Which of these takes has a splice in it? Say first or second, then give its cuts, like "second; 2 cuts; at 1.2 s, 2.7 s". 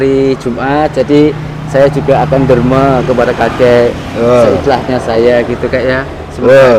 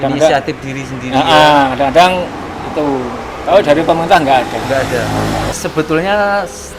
second; 1 cut; at 5.5 s